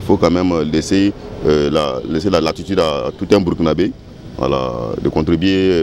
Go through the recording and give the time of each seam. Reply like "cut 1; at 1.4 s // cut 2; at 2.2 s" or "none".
cut 1; at 4.1 s